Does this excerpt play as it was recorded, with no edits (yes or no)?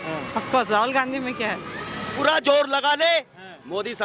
no